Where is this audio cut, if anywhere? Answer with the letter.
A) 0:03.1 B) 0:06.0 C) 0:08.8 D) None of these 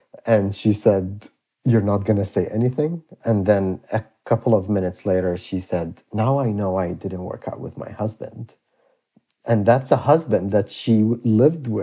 A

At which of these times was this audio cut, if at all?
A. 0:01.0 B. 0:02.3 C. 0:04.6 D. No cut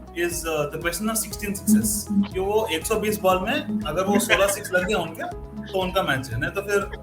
B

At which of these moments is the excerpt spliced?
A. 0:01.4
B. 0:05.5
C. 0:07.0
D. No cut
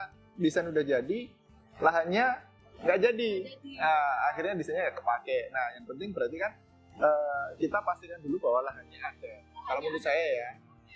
D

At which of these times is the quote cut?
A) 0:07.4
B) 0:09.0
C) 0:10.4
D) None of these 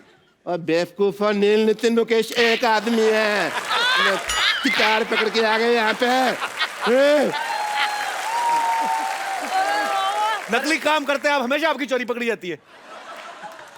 D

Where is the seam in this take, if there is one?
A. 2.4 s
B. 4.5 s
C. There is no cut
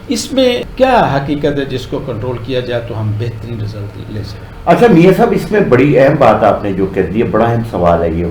C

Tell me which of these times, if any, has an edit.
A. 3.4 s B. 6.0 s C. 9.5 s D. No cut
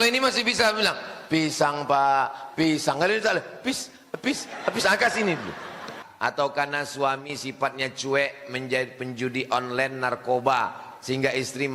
B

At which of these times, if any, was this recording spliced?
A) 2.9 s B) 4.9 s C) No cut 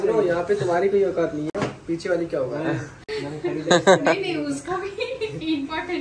C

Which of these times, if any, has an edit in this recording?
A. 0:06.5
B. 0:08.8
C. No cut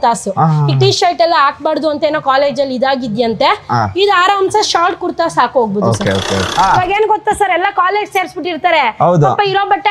A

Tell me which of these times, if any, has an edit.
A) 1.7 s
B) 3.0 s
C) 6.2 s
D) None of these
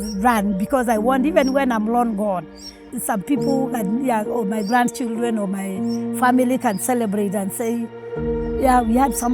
B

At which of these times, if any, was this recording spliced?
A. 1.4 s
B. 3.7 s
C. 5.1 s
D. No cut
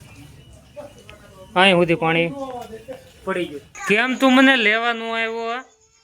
B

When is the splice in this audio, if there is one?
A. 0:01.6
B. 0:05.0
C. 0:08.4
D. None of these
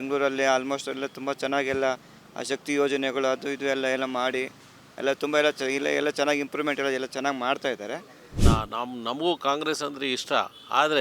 C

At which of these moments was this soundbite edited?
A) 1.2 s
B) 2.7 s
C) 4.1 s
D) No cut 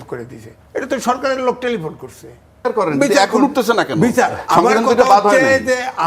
B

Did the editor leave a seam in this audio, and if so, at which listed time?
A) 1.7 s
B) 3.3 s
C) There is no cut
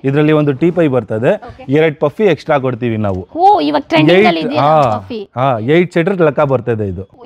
C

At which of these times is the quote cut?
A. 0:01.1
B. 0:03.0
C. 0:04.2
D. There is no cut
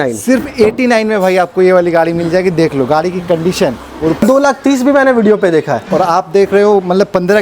C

